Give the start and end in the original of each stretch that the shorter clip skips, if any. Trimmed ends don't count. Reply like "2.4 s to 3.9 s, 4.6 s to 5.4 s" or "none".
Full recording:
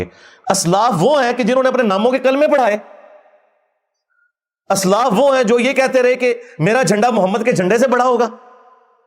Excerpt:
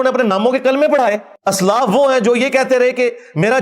2.9 s to 4.5 s